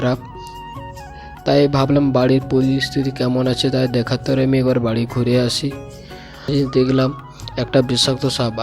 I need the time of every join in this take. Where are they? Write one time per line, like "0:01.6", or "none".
0:06.5